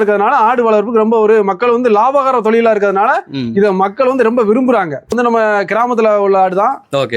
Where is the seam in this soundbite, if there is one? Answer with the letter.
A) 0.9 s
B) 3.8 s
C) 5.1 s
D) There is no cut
C